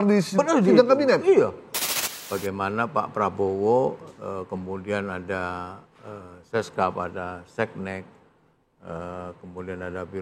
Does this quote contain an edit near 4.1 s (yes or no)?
no